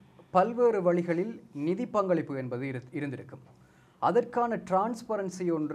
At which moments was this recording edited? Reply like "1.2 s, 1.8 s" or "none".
none